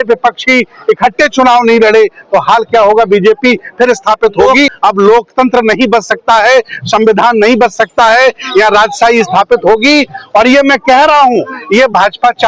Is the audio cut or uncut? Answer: cut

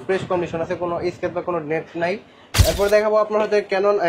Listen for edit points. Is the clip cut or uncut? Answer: cut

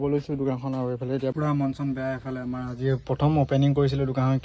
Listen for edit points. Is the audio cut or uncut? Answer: cut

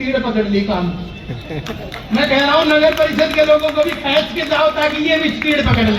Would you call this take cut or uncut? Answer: uncut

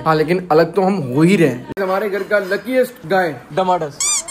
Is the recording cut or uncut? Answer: cut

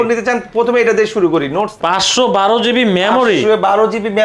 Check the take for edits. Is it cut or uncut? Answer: cut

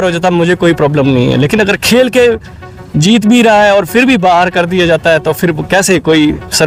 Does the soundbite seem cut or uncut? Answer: uncut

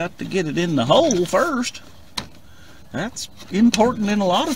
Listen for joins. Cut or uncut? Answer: uncut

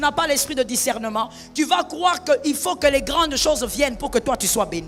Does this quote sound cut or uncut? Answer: uncut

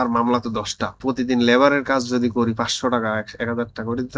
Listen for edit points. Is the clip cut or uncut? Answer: cut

